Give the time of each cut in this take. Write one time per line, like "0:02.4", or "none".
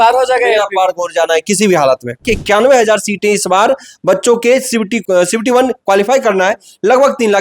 0:02.3
0:05.0